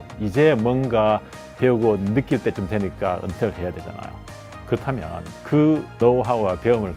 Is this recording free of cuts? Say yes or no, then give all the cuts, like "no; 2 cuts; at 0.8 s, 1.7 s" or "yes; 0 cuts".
yes; 0 cuts